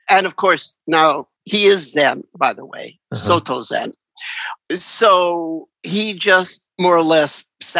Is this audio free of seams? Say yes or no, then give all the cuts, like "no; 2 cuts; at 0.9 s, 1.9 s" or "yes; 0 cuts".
yes; 0 cuts